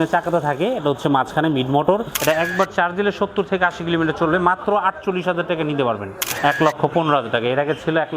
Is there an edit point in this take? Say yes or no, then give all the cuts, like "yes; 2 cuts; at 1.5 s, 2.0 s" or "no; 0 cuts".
yes; 2 cuts; at 2.1 s, 6.2 s